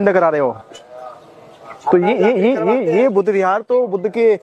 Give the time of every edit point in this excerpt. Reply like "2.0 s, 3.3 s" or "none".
none